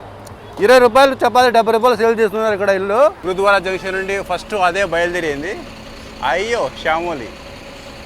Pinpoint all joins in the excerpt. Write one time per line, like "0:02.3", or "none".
0:03.2